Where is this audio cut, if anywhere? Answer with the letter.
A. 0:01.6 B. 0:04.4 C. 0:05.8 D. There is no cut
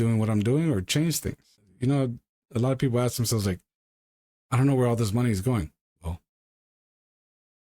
A